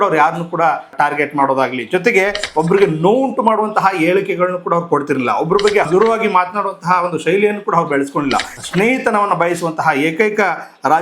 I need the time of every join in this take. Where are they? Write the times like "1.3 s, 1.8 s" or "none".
0.9 s, 5.9 s, 8.6 s